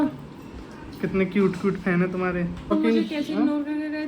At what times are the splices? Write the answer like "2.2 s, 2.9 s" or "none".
2.7 s

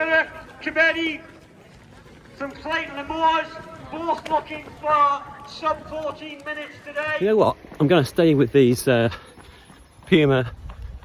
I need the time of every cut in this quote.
7.1 s

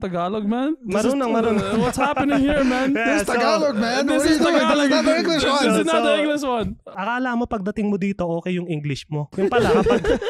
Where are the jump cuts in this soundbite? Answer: 6.9 s, 9.3 s

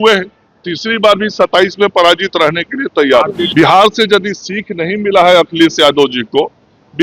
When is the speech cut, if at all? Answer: 3.4 s

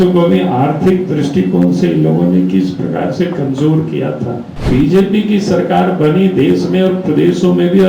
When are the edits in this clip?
4.7 s

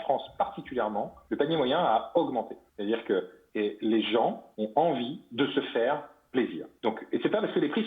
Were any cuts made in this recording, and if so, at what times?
1.2 s, 2.6 s, 3.4 s, 4.5 s, 6.6 s

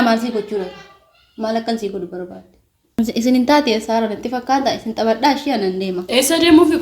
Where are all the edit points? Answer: 2.8 s

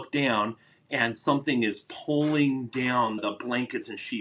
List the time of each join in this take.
3.2 s

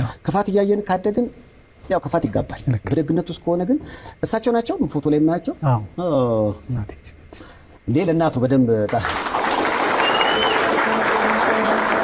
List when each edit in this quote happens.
none

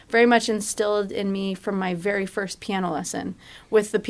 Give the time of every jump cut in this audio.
none

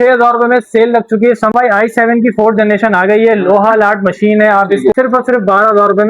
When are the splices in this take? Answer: 1.5 s, 4.9 s

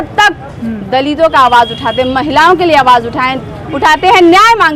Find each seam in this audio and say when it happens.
none

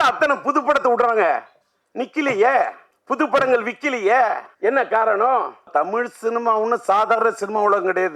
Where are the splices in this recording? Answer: 2.9 s, 4.5 s, 5.7 s

